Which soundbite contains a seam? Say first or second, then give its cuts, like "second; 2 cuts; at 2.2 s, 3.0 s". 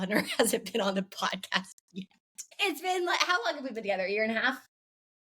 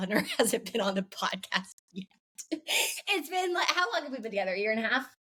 first; 1 cut; at 2.4 s